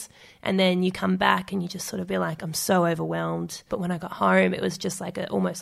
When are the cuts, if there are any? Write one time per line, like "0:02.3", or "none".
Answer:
0:03.7